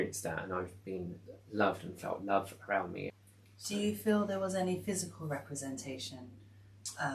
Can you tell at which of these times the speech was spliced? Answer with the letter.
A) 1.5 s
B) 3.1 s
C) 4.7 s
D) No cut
B